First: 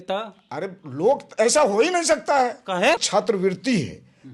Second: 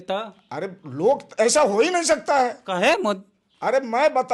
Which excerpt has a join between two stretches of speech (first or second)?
first